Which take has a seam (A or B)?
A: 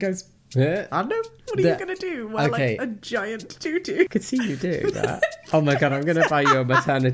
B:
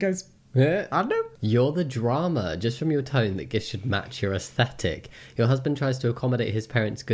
A